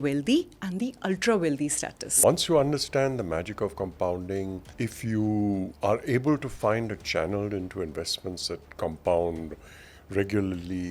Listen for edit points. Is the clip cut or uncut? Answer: cut